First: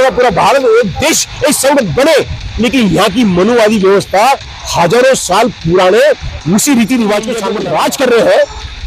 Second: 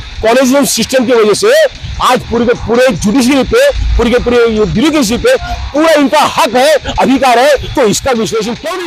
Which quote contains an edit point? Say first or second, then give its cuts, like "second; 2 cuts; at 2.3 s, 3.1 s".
first; 1 cut; at 7.4 s